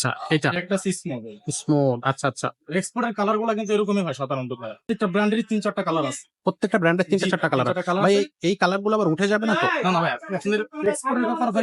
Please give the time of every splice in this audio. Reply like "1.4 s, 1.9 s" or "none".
4.8 s